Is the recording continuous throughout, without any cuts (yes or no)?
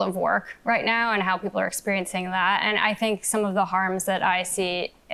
yes